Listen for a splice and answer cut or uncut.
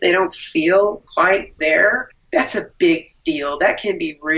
cut